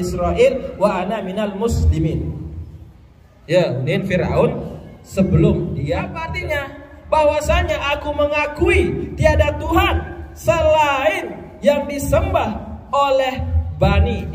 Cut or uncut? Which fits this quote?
cut